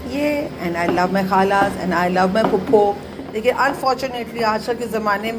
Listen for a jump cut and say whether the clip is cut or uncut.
cut